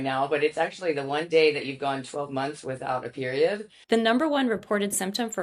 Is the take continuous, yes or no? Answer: no